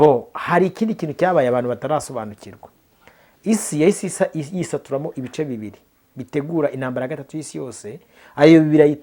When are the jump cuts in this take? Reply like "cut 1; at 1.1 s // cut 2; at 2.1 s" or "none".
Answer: none

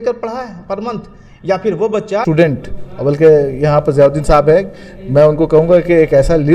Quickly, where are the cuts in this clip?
cut 1; at 2.2 s

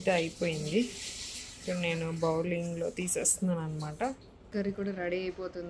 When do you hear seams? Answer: cut 1; at 4.5 s

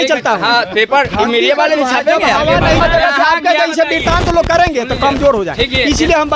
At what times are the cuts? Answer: cut 1; at 2.8 s

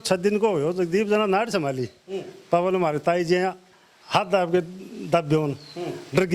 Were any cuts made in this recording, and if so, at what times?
none

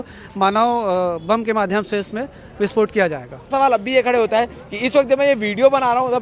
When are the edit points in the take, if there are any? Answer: cut 1; at 3.5 s

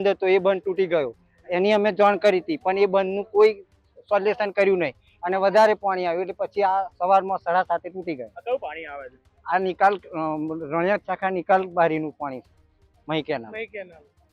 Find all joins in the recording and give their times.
none

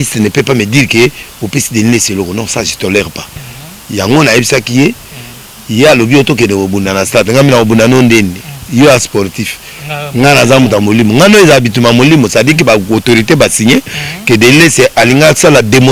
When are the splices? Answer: none

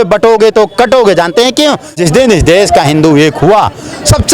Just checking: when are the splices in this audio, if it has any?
cut 1; at 1.9 s

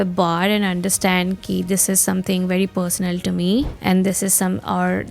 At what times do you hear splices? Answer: cut 1; at 3.7 s

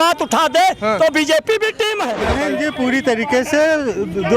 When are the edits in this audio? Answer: cut 1; at 2.2 s

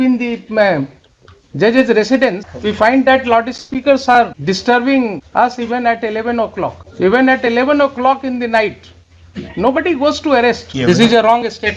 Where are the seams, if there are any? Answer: cut 1; at 2.5 s // cut 2; at 4.4 s // cut 3; at 5.2 s // cut 4; at 6.8 s // cut 5; at 10.7 s

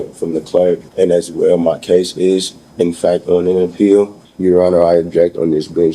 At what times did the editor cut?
cut 1; at 0.9 s // cut 2; at 4.2 s

